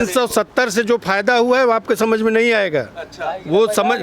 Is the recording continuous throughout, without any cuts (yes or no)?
yes